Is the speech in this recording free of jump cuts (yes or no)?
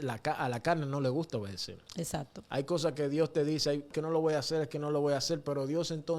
no